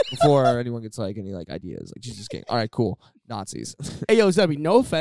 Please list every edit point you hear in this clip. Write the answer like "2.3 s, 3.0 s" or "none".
3.9 s